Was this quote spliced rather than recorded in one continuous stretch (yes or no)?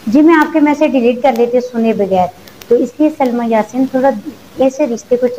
no